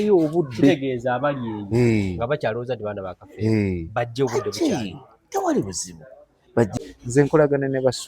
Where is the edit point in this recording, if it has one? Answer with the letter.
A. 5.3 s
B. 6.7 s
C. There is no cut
B